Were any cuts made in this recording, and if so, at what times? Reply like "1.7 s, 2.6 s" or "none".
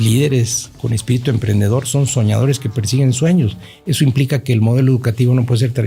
none